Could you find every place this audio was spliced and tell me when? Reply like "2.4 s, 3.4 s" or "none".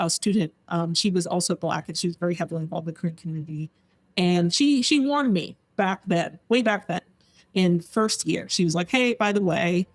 none